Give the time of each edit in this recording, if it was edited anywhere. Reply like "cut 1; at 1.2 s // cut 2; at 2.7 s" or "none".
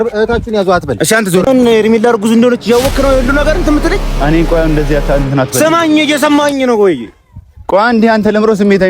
cut 1; at 1.5 s